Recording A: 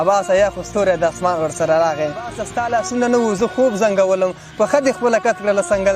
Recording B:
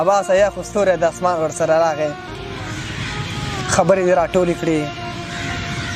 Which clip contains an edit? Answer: A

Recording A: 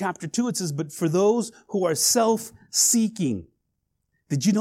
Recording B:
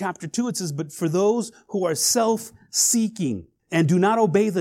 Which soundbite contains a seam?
B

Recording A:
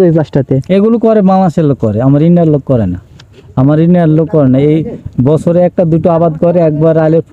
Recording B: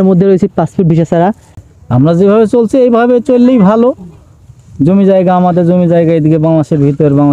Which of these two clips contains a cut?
B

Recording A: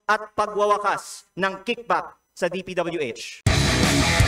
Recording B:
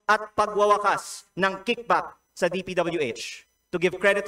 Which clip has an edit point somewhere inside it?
A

